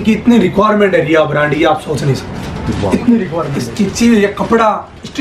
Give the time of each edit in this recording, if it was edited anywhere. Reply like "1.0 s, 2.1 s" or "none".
3.6 s